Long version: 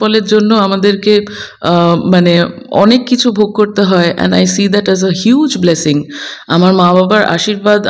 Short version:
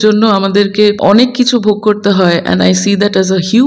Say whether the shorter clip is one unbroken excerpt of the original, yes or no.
no